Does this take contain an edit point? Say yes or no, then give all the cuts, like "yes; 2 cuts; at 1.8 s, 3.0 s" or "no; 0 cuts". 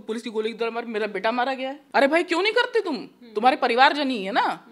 yes; 1 cut; at 1.8 s